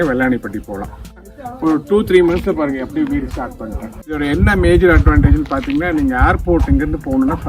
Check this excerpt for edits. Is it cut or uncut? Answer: cut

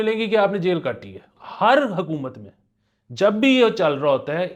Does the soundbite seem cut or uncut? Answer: cut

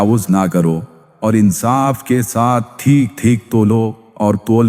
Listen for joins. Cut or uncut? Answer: cut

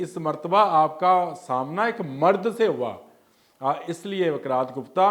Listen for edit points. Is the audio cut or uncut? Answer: uncut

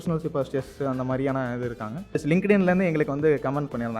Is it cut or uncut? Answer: cut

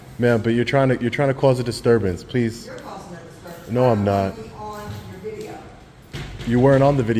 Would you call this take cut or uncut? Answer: uncut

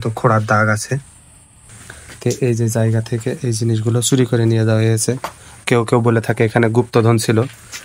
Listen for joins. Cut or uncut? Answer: cut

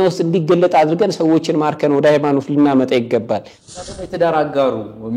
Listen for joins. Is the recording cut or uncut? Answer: cut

